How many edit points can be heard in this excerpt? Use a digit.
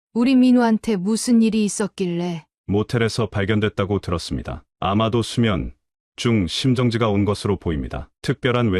1